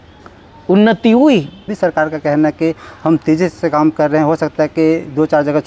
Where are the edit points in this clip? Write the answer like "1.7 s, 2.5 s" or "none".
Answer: 1.7 s